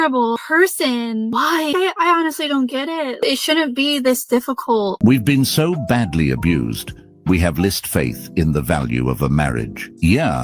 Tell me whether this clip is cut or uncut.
cut